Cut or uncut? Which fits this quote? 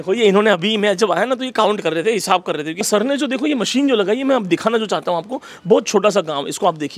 cut